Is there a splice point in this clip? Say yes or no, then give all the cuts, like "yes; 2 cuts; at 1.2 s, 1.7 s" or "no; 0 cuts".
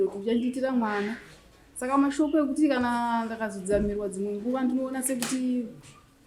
no; 0 cuts